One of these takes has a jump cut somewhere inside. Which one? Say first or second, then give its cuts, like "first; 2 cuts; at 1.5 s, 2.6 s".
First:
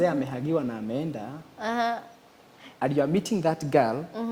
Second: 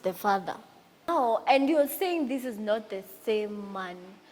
second; 1 cut; at 1.1 s